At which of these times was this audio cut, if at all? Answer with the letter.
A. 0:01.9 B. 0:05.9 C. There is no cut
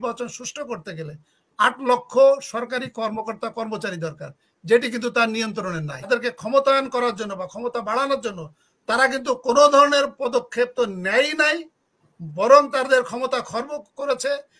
B